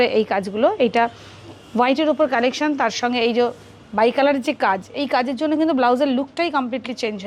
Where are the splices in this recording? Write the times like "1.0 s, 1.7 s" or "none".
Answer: none